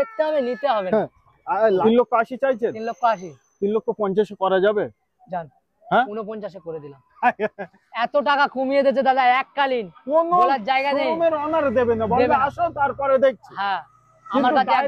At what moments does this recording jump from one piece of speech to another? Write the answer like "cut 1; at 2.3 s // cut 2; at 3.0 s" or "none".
cut 1; at 1.8 s